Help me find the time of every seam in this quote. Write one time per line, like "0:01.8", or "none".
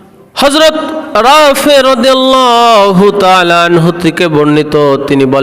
none